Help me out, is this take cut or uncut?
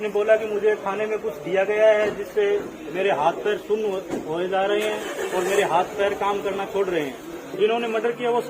cut